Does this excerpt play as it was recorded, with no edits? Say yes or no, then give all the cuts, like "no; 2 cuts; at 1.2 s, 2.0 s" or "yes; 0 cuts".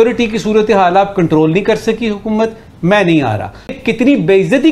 no; 1 cut; at 3.7 s